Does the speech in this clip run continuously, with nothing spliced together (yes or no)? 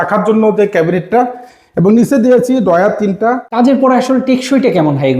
no